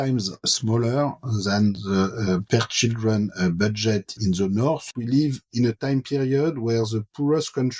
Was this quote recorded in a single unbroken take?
no; 1 cut; at 4.9 s

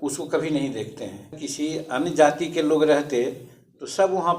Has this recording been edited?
yes; 1 cut; at 1.4 s

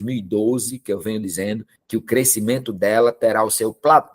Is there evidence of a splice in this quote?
yes; 1 cut; at 1.7 s

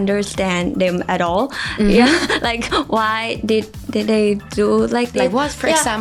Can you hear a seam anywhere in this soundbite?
no; 0 cuts

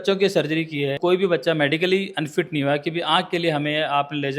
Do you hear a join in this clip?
yes; 1 cut; at 0.9 s

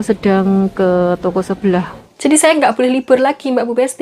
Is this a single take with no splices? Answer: no; 1 cut; at 2.0 s

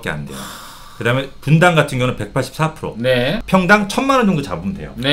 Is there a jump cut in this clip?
yes; 1 cut; at 3.4 s

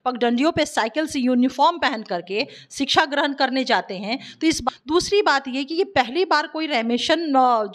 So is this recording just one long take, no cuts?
no; 1 cut; at 4.7 s

